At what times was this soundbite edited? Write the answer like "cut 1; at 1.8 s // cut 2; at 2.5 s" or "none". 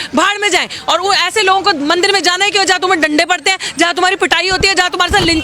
none